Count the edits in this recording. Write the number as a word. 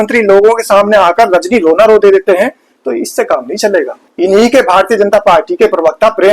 one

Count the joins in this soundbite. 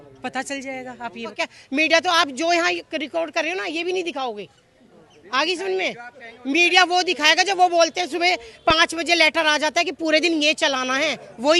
one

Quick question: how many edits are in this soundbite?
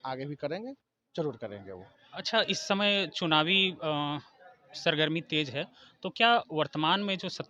zero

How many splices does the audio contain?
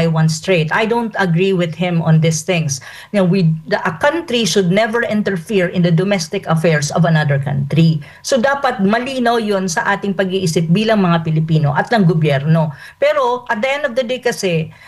one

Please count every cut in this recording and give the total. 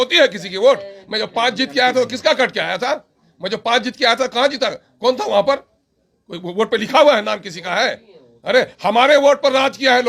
zero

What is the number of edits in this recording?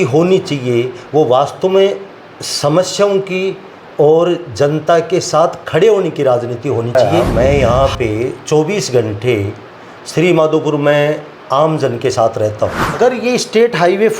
two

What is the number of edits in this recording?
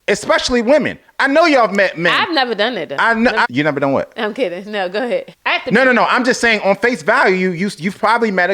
two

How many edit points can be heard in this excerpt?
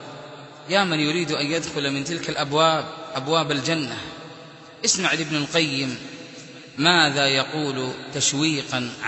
zero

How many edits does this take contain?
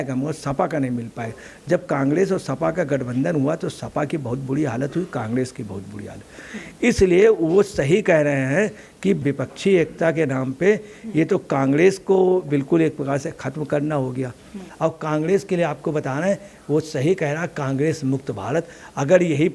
one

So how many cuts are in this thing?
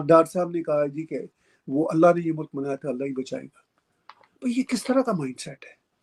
zero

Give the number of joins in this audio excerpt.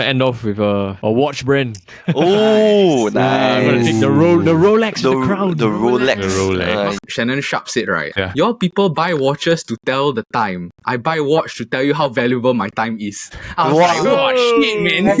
three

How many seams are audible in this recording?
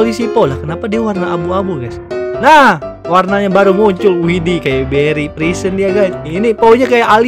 one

